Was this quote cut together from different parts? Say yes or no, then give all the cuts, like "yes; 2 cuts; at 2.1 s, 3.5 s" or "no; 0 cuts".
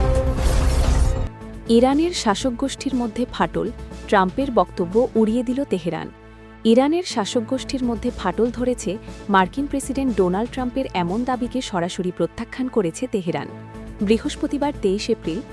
yes; 1 cut; at 1.4 s